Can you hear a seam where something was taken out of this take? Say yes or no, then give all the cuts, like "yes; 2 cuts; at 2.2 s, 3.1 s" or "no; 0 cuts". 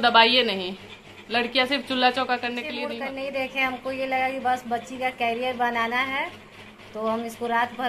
yes; 1 cut; at 2.8 s